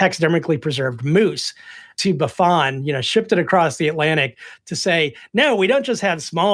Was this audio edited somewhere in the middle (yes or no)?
no